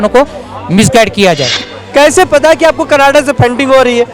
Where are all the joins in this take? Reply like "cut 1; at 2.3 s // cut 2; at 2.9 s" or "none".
cut 1; at 1.6 s